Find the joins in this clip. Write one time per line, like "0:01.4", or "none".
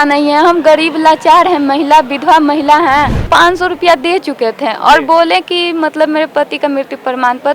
0:03.2

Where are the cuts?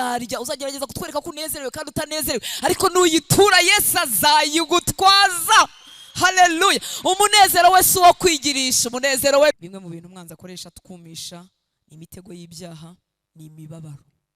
0:09.5

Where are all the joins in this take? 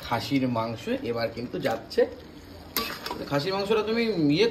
none

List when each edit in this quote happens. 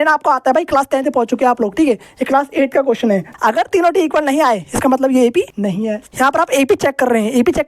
0:03.3
0:05.9

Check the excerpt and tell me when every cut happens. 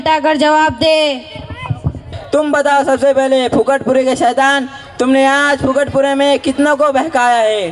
0:02.1

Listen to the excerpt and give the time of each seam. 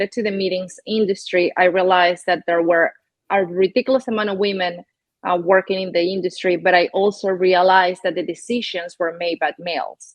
none

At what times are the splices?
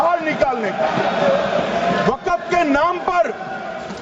none

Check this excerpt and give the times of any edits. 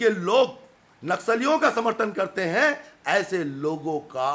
none

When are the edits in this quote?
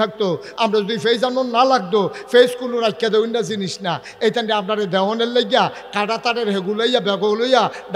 none

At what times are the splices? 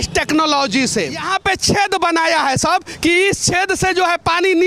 0:01.3

